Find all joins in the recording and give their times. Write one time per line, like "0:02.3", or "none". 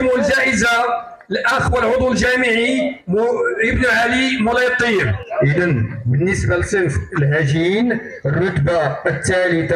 0:05.2

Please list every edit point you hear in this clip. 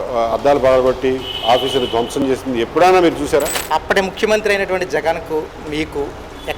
0:03.6

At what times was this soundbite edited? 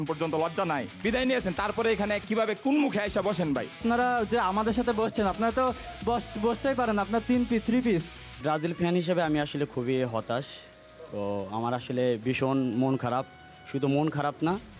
0:03.8
0:08.4

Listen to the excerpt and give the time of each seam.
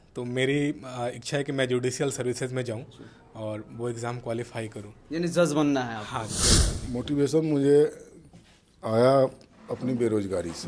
0:06.7

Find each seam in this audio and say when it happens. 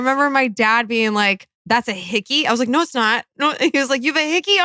0:01.6

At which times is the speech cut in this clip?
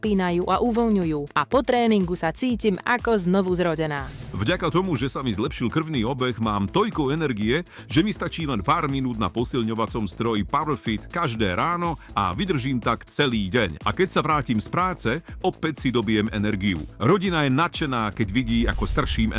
none

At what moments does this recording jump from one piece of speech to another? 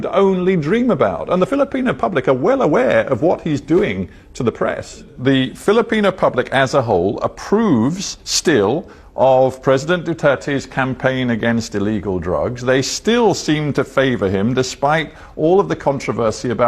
0:05.1

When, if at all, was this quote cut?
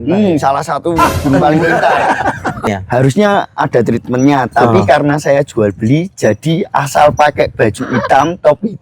0:02.7

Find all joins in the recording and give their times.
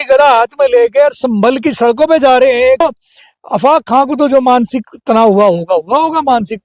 0:02.8

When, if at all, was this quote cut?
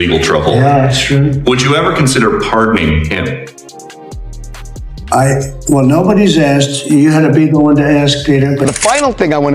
0:08.6

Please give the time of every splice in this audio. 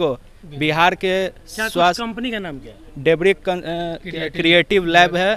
none

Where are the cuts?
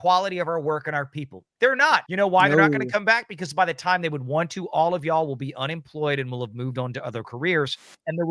0:02.1

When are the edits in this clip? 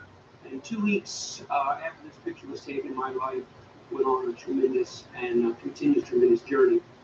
0:06.1

